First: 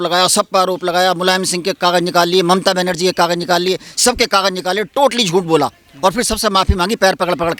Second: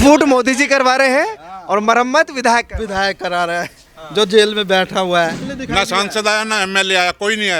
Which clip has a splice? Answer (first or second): second